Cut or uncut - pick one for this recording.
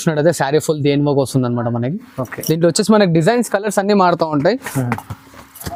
uncut